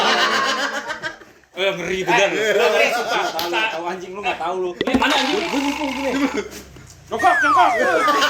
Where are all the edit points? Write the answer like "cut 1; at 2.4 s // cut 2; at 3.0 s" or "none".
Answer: none